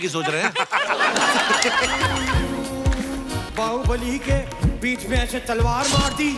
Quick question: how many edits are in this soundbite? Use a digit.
1